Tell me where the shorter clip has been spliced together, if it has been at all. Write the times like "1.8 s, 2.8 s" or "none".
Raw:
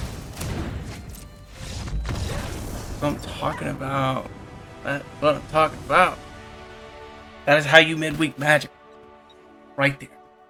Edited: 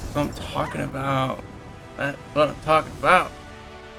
none